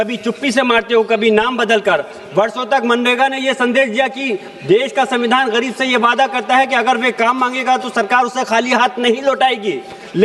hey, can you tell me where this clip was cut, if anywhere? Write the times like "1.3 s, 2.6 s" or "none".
none